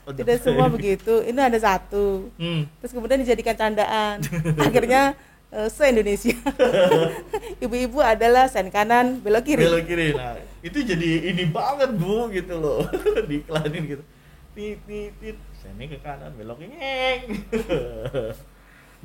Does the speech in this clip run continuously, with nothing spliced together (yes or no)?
yes